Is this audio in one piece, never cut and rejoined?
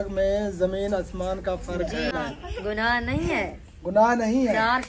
no; 1 cut; at 2.1 s

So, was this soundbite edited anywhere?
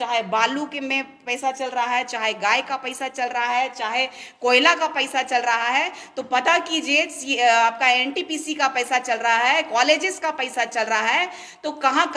no; 0 cuts

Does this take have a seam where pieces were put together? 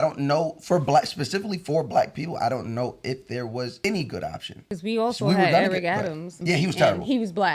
yes; 3 cuts; at 3.8 s, 4.5 s, 6.3 s

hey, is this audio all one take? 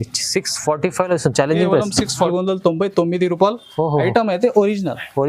no; 1 cut; at 2.3 s

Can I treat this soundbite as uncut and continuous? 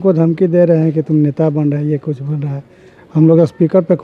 yes; 0 cuts

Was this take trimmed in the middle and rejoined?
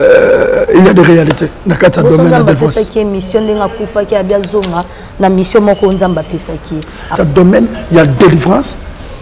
yes; 1 cut; at 7.1 s

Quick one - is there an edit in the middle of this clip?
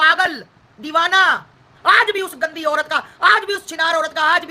yes; 1 cut; at 1.7 s

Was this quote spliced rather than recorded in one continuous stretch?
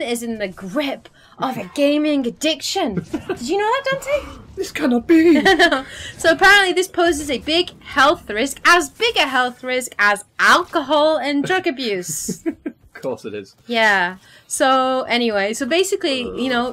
yes; 1 cut; at 8.7 s

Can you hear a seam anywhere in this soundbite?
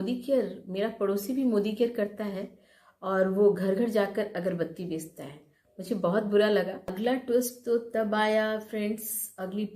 yes; 1 cut; at 6.9 s

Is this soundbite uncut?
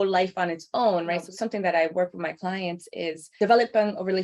no; 2 cuts; at 1.3 s, 3.3 s

